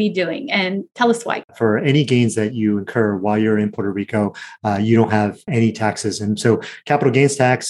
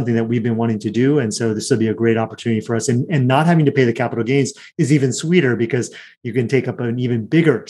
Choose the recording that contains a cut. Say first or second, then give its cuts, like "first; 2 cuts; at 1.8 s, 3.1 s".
first; 2 cuts; at 1.5 s, 5.4 s